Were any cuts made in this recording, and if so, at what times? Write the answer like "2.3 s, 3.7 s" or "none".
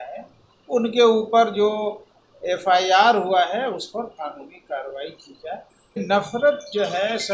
6.0 s

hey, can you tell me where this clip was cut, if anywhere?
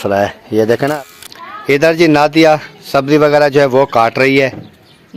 0.9 s

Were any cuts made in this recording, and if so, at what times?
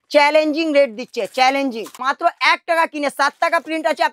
2.1 s

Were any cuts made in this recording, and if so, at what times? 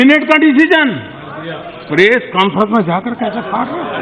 none

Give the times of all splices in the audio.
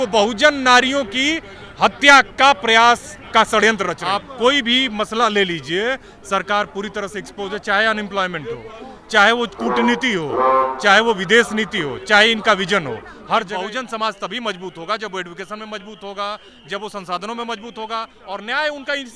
3.1 s, 4.0 s, 13.5 s

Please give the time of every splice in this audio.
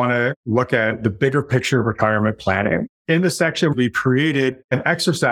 2.9 s, 3.7 s

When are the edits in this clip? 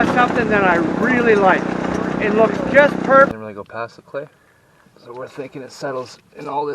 3.3 s

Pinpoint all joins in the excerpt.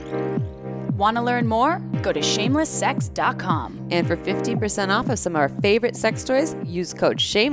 1.0 s

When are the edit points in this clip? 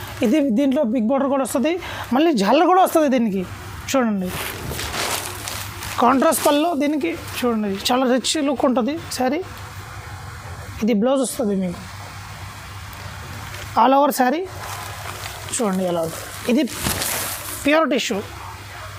none

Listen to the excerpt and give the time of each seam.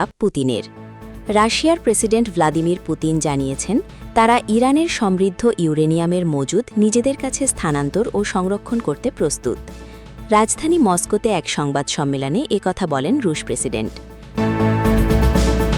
14.2 s

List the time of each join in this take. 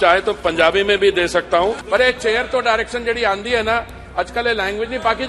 1.8 s

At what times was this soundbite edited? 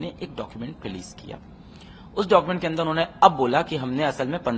none

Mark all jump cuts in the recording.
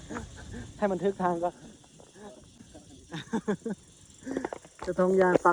none

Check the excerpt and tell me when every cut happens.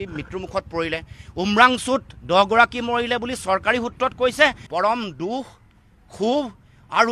4.6 s

